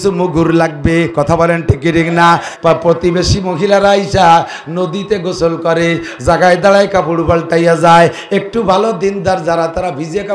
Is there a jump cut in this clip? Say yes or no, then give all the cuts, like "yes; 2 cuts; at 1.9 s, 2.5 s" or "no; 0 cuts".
yes; 1 cut; at 2.5 s